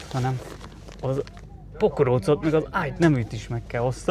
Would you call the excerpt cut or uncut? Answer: uncut